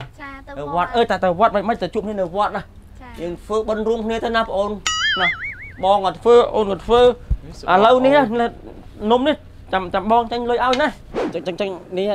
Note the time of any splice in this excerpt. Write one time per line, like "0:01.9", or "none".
0:11.1